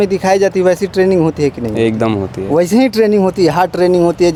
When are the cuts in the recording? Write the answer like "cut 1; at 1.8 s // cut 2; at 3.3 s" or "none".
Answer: none